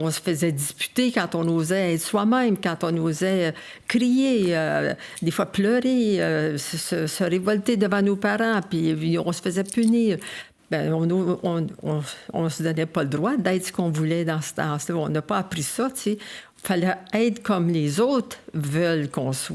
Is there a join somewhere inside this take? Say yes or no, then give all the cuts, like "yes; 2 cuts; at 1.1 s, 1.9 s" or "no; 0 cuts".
no; 0 cuts